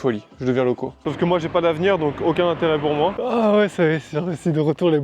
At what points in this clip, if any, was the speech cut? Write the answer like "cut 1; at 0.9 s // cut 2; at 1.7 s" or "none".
cut 1; at 1.0 s // cut 2; at 3.2 s